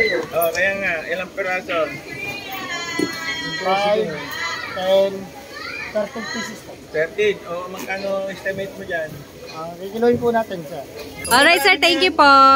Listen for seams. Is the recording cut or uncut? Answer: cut